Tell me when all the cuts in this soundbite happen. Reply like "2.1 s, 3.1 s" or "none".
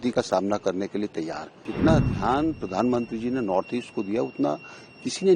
1.6 s